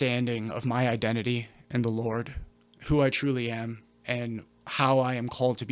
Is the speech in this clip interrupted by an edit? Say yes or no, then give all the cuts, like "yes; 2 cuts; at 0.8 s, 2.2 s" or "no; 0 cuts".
no; 0 cuts